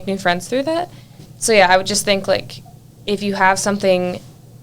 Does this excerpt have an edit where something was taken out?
yes; 1 cut; at 1.2 s

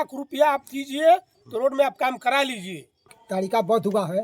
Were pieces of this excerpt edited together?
yes; 1 cut; at 3.2 s

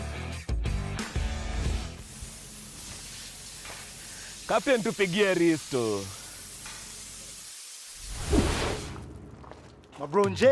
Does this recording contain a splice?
yes; 1 cut; at 1.9 s

